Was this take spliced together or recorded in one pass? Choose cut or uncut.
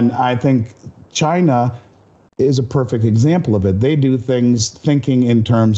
uncut